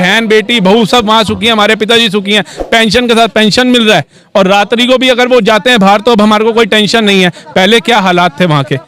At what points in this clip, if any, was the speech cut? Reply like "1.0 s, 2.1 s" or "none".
none

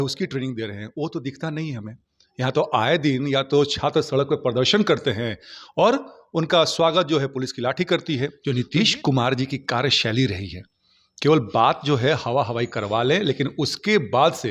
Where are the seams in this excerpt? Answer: 8.4 s

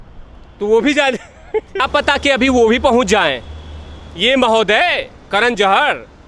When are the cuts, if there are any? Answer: 1.8 s

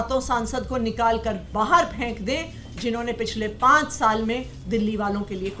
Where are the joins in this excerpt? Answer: none

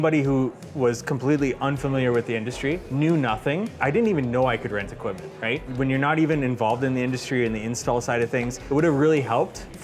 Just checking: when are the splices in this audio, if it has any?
2.9 s, 3.8 s, 5.6 s, 8.6 s

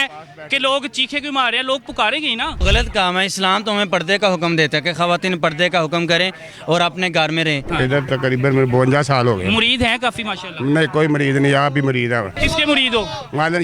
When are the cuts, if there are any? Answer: 2.6 s, 7.7 s, 12.3 s

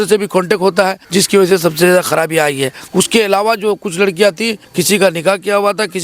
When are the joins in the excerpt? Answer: 1.0 s, 2.8 s, 4.6 s

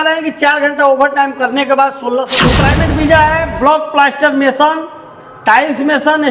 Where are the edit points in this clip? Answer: 2.3 s

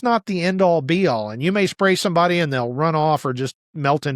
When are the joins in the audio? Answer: none

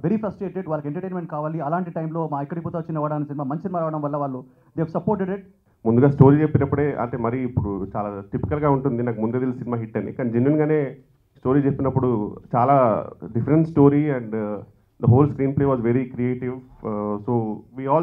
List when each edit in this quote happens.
5.6 s

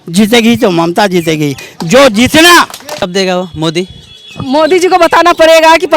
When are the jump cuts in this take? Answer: 3.0 s

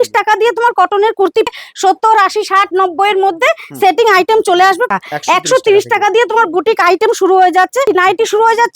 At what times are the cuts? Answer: 1.5 s, 4.9 s, 7.9 s

